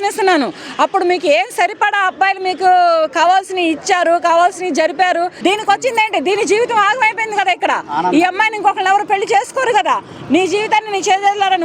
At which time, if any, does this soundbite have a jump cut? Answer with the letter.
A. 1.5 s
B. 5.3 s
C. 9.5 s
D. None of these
B